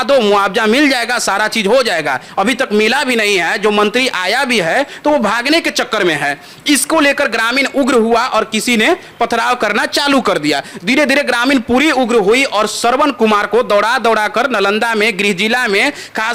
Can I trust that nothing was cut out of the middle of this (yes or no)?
yes